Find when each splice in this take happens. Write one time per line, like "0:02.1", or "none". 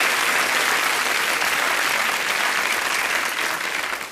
none

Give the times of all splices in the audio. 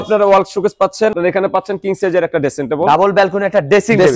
0:01.1

